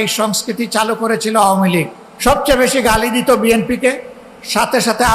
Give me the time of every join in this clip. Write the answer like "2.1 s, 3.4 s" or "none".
2.0 s